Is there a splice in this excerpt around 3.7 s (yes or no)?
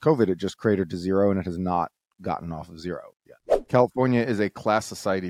yes